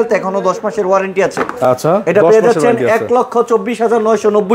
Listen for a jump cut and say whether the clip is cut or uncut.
uncut